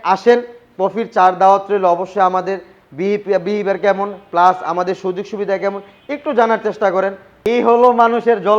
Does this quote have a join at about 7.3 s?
yes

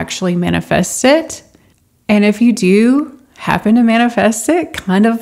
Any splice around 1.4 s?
no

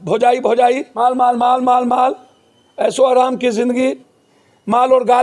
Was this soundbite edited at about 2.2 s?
no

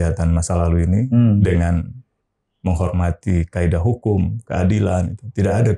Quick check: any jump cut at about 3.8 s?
no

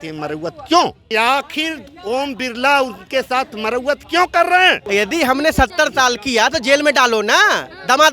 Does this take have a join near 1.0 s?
yes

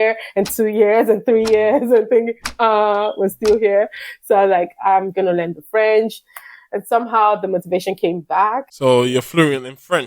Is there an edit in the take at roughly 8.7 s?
yes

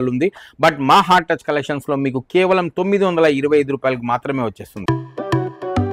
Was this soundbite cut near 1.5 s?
no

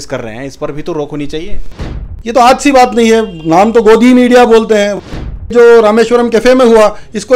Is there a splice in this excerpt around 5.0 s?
yes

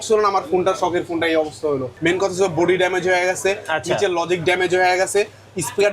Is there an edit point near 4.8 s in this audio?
no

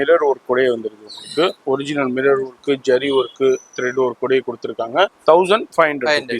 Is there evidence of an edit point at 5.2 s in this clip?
yes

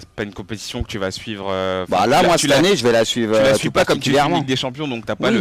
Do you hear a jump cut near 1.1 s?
no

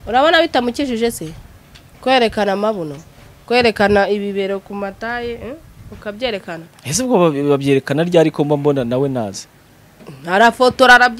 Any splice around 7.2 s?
no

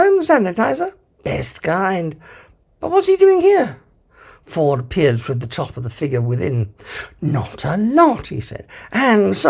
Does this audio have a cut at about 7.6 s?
no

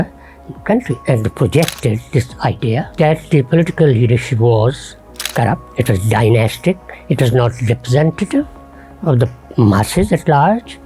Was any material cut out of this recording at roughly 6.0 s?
no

